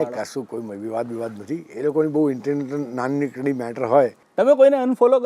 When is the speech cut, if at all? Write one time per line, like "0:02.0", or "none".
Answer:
0:04.2